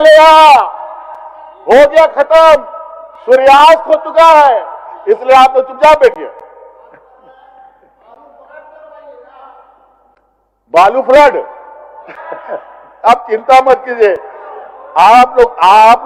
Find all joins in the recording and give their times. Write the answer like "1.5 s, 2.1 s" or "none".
none